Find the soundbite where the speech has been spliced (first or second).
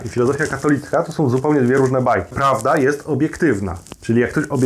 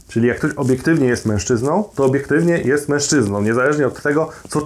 first